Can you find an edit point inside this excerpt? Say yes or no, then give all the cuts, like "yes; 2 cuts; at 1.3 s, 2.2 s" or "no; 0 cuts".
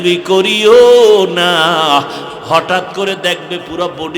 yes; 1 cut; at 2.2 s